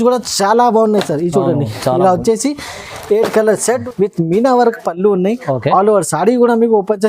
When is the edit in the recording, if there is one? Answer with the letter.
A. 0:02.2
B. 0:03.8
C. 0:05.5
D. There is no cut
B